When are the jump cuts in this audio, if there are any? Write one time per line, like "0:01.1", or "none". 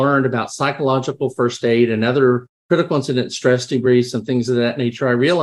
0:02.6